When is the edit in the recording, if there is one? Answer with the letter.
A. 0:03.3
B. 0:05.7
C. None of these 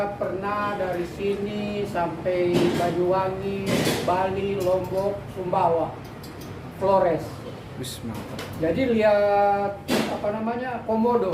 C